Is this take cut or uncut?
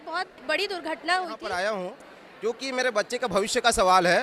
cut